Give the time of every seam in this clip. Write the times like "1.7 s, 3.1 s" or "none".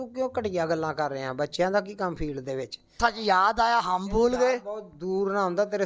3.0 s